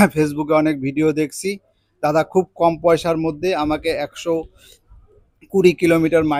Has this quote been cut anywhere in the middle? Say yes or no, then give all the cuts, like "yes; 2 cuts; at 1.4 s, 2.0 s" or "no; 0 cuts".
no; 0 cuts